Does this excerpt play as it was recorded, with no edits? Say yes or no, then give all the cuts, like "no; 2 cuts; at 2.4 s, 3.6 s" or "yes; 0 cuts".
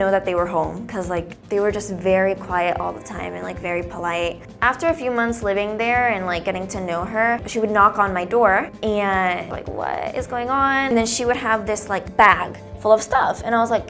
yes; 0 cuts